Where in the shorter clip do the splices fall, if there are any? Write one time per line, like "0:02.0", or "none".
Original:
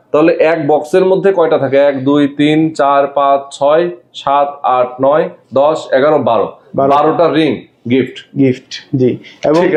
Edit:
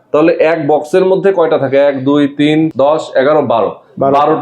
0:02.7